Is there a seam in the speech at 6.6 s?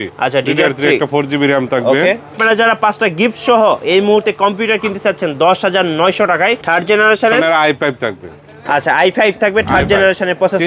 yes; 2 cuts; at 2.4 s, 6.6 s

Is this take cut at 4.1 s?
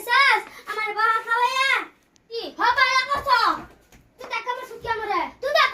no; 1 cut; at 2.5 s

